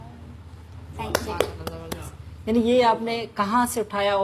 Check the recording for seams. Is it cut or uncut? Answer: uncut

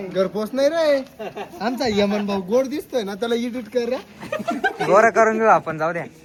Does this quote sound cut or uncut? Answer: uncut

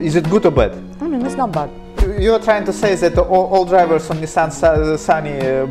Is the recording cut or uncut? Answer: cut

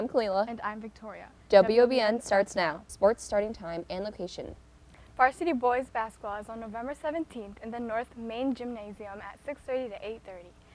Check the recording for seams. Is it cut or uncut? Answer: cut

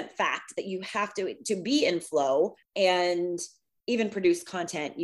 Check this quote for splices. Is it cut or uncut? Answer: cut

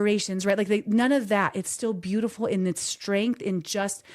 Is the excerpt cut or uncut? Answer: uncut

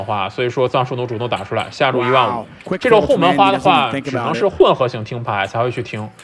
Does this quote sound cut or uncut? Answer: uncut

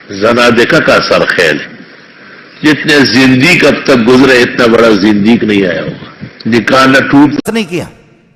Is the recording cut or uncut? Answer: cut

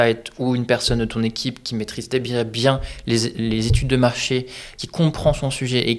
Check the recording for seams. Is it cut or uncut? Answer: uncut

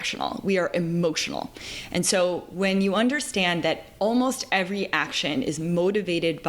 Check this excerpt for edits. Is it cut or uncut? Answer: uncut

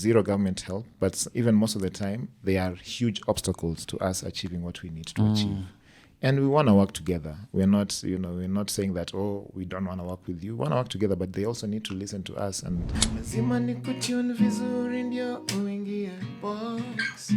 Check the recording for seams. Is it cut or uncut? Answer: cut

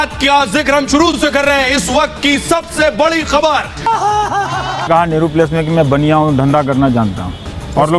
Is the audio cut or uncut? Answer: cut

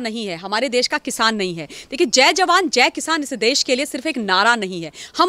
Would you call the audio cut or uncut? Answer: uncut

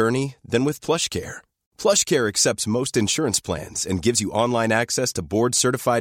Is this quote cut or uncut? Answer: uncut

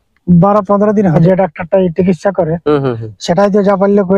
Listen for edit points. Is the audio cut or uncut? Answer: cut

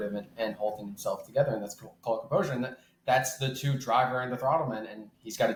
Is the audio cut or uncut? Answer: uncut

